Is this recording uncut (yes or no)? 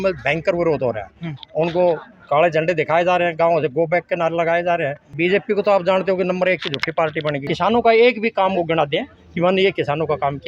no